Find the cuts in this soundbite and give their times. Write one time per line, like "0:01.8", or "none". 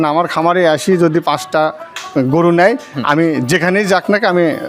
none